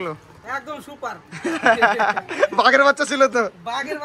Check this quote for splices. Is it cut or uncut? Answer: uncut